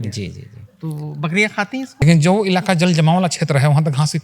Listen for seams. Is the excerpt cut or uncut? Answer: cut